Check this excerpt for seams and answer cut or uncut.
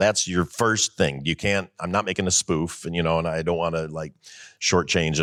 uncut